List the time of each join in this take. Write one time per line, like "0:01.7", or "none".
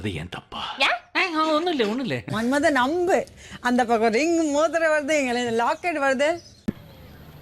none